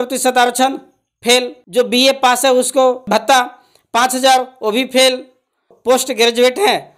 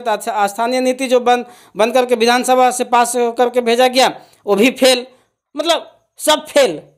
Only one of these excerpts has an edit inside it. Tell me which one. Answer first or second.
first